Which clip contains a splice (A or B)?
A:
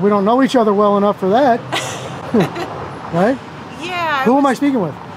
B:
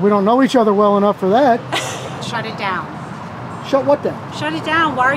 B